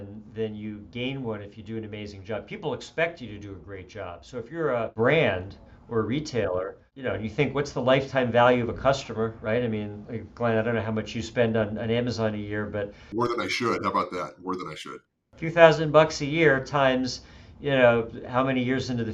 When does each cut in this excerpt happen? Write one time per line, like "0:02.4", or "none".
0:04.9
0:06.9
0:13.0
0:14.9